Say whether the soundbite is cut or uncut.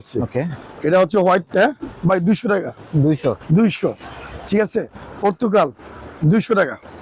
uncut